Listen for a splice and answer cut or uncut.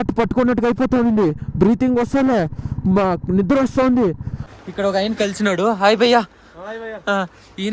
cut